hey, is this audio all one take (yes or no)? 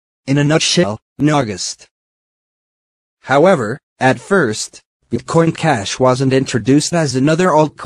yes